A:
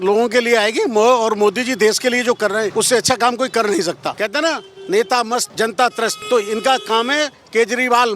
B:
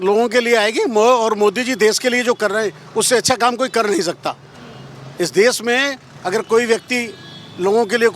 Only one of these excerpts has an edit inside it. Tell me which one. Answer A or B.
A